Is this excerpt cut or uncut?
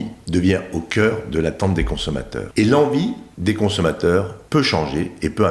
cut